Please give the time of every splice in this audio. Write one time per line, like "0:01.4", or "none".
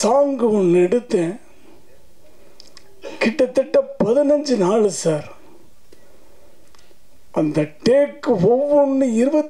none